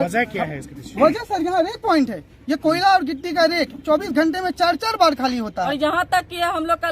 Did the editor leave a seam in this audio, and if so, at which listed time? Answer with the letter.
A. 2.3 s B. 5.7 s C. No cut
B